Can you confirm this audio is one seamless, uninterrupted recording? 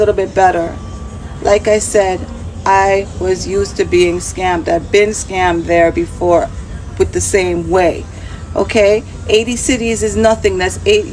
yes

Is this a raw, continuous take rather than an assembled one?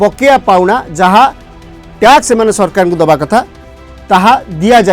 yes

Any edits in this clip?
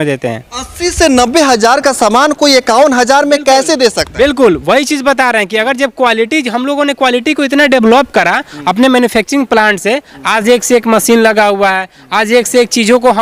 no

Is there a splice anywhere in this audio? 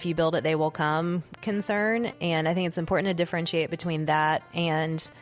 no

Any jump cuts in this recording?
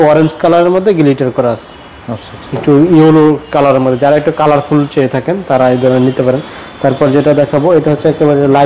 no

